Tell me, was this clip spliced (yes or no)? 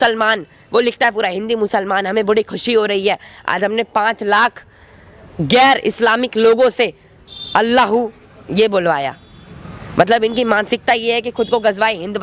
no